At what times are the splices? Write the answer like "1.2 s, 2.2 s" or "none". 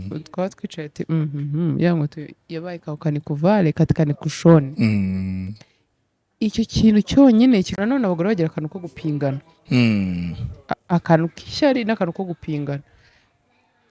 7.7 s